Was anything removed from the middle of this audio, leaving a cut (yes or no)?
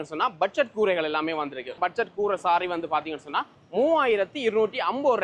no